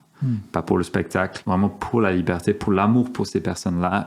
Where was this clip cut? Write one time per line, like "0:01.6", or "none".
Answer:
0:01.4